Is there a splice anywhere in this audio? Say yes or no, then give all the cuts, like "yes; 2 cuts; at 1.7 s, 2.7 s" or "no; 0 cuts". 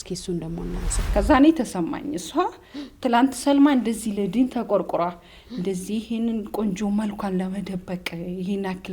yes; 1 cut; at 0.9 s